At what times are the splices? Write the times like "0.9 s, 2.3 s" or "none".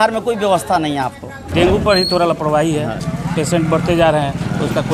1.5 s, 3.0 s